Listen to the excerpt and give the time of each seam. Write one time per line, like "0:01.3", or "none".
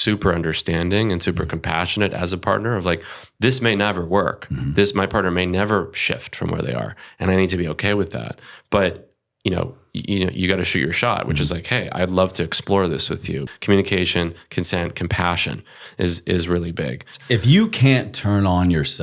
0:13.5
0:17.1

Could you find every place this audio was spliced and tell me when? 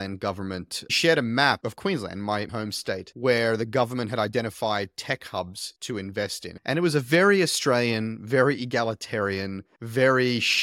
0:00.9
0:06.5

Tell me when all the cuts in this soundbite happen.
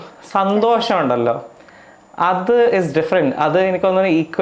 none

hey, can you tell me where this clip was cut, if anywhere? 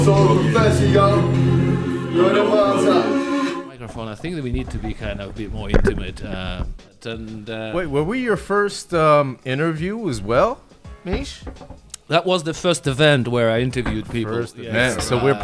0:03.6
0:07.0

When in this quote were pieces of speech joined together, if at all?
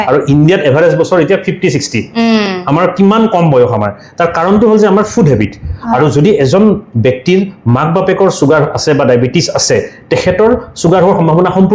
none

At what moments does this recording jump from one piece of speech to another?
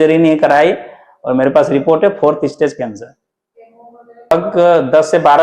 0:04.3

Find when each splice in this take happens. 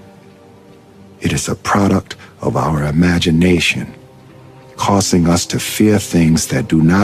0:05.2

